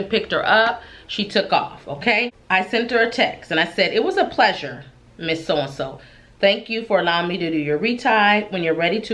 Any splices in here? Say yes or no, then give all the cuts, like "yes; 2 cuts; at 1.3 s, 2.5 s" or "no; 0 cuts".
yes; 1 cut; at 2.4 s